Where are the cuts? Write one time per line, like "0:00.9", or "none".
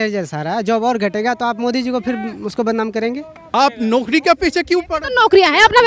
0:03.5